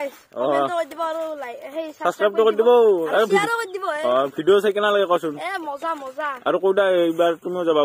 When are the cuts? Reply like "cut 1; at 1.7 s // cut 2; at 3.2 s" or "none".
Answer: none